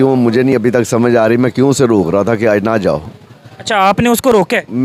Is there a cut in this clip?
no; 0 cuts

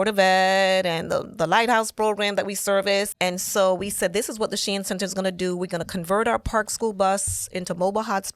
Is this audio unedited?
no; 1 cut; at 3.1 s

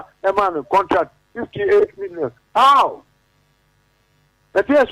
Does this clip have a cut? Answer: no; 0 cuts

